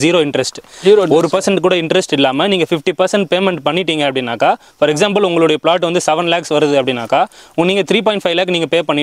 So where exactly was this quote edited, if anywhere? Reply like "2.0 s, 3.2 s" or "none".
none